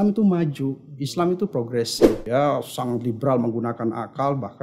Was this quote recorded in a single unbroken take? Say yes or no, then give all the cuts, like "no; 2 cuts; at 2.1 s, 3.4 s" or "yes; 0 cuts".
no; 1 cut; at 2.2 s